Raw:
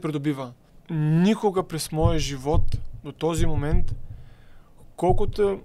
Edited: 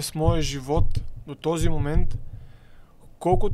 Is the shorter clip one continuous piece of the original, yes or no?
yes